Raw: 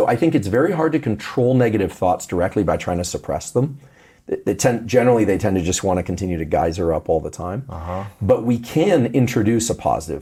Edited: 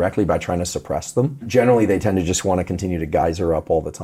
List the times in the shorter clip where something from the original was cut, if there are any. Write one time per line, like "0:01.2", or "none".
0:01.4